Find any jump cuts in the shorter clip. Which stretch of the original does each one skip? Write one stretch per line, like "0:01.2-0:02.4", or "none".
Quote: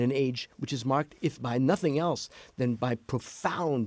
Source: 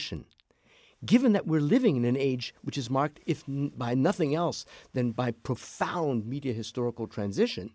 0:03.4-0:03.7